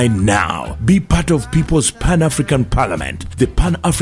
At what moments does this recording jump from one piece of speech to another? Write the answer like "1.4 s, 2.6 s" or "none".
none